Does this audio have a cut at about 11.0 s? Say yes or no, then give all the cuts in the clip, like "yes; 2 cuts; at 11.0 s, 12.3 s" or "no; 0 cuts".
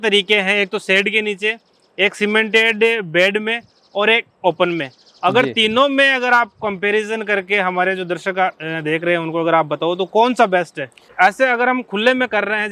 yes; 1 cut; at 11.0 s